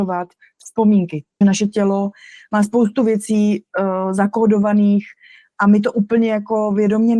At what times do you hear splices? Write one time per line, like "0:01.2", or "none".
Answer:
0:01.4